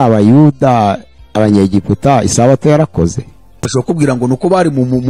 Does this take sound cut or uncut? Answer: cut